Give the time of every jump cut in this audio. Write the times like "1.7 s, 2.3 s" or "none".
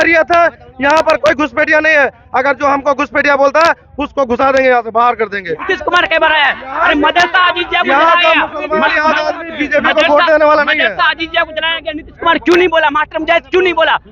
5.7 s